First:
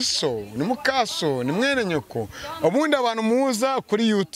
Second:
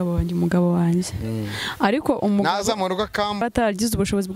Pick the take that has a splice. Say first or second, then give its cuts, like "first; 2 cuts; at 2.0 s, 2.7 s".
second; 1 cut; at 3.4 s